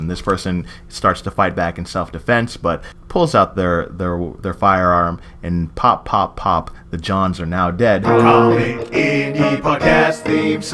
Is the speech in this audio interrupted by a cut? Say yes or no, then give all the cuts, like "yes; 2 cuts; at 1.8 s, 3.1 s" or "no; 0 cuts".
yes; 1 cut; at 8.0 s